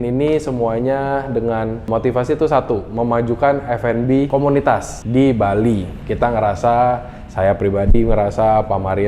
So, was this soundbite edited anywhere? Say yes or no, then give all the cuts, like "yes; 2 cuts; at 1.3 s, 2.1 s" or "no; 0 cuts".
yes; 3 cuts; at 1.9 s, 4.7 s, 6.0 s